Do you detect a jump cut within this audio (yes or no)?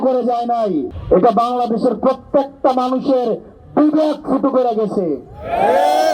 yes